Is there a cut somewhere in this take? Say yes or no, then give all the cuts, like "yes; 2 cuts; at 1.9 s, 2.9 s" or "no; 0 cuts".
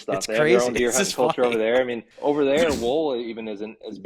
yes; 1 cut; at 2.1 s